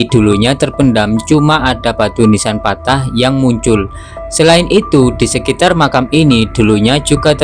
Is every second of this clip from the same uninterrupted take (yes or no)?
yes